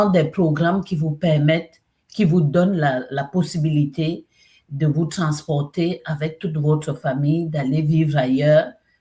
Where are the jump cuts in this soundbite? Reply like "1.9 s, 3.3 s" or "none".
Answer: none